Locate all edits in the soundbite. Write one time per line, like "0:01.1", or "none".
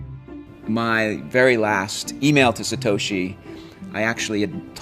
0:02.0